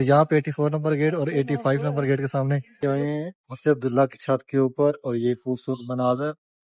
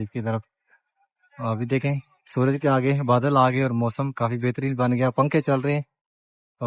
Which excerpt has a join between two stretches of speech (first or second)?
first